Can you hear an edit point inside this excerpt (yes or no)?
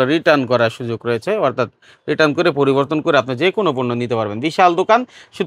no